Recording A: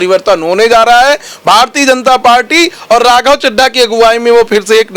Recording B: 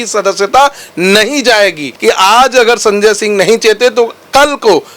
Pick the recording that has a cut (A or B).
B